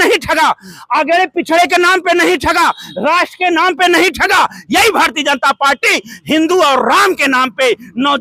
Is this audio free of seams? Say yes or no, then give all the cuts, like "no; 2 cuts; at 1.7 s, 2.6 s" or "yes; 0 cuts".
yes; 0 cuts